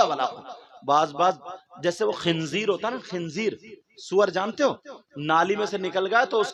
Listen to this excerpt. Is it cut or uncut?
uncut